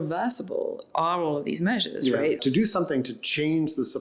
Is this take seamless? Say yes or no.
no